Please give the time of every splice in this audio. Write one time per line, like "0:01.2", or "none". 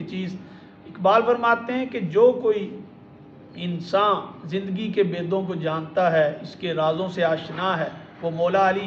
none